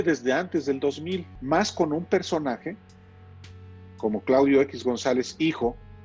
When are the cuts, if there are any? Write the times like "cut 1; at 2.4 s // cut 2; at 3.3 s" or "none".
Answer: cut 1; at 1.3 s